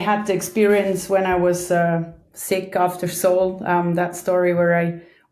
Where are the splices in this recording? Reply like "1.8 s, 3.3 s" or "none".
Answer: none

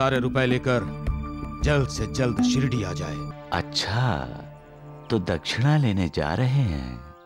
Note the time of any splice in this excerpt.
3.3 s

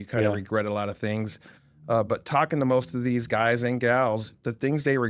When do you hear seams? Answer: none

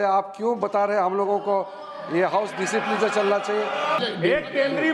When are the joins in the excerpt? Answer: 4.0 s

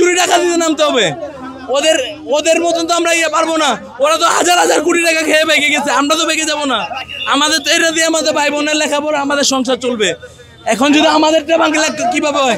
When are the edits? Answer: none

